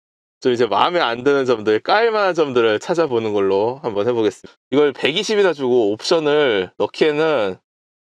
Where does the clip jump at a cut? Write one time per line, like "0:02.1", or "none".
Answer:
0:04.5